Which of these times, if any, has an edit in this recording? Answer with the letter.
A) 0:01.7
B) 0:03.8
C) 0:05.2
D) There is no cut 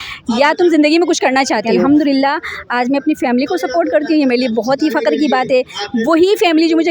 A